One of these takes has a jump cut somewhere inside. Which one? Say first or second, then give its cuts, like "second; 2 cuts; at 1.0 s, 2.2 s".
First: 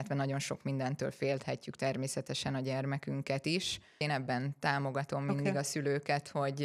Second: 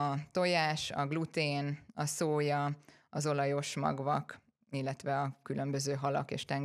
first; 1 cut; at 4.0 s